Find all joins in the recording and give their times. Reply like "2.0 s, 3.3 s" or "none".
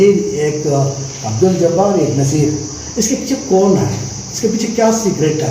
none